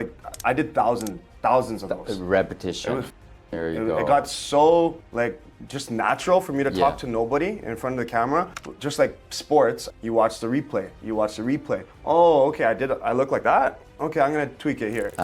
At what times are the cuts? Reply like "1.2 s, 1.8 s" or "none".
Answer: 5.0 s, 8.6 s, 9.9 s